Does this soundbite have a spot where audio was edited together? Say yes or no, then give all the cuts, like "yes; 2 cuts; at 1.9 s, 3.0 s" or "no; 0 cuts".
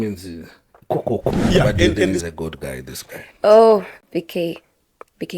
yes; 1 cut; at 2.2 s